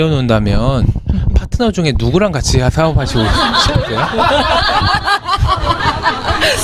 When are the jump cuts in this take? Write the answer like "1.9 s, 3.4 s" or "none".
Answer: none